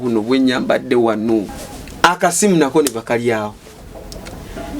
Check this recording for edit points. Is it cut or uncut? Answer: cut